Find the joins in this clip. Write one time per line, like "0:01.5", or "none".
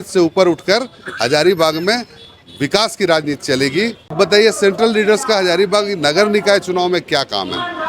0:04.1